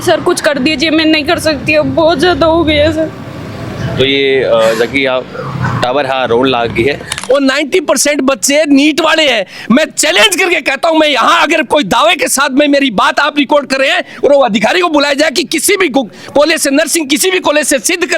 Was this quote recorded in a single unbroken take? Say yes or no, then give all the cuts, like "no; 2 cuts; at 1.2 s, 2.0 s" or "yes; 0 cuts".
no; 1 cut; at 7.1 s